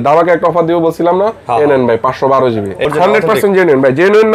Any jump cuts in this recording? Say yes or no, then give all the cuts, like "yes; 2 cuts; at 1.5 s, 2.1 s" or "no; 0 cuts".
yes; 1 cut; at 2.9 s